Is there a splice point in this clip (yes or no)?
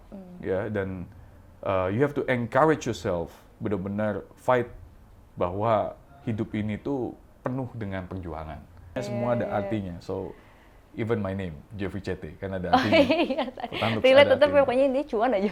yes